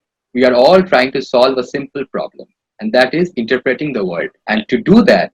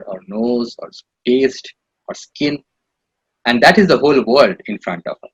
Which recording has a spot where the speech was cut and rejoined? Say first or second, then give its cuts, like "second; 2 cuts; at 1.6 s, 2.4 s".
first; 1 cut; at 4.4 s